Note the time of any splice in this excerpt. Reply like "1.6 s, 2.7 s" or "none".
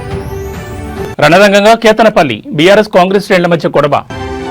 1.0 s